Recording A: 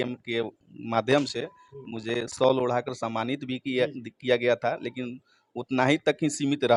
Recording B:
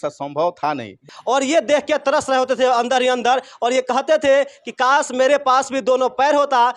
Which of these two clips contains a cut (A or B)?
B